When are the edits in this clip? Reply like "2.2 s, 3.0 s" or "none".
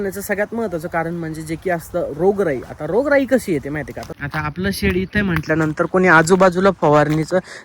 4.0 s

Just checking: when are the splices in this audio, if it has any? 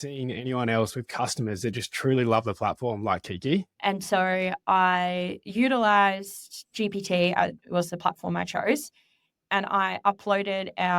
3.7 s

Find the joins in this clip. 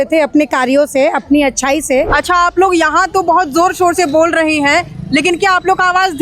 2.1 s

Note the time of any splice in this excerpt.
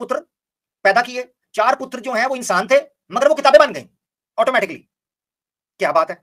none

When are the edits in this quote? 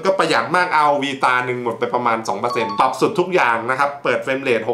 none

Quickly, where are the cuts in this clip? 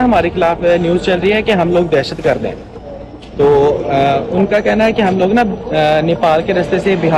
none

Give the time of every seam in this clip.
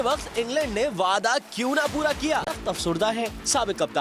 2.6 s

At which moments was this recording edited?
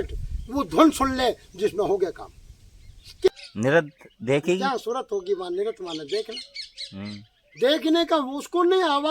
3.3 s

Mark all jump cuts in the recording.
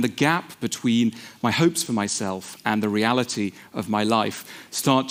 none

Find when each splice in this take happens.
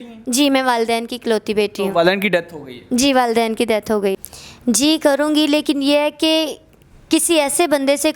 4.1 s

